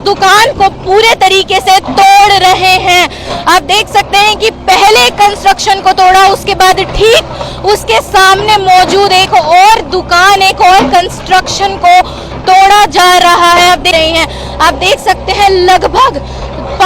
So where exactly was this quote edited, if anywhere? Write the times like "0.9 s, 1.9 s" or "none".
13.9 s